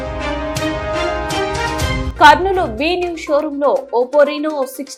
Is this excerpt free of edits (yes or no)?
yes